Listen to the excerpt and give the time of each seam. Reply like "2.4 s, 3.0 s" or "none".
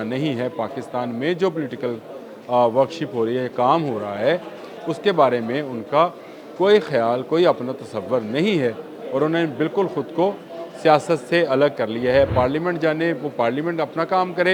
none